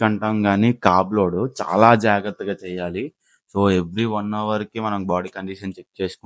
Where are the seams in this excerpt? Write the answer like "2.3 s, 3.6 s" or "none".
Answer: none